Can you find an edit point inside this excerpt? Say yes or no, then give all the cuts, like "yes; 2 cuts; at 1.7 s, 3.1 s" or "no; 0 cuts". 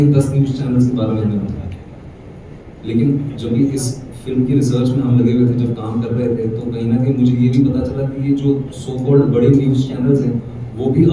no; 0 cuts